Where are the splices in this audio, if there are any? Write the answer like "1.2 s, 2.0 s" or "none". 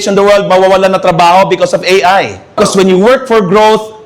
2.6 s